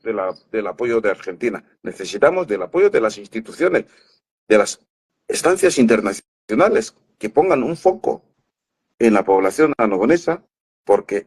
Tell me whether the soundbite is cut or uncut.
uncut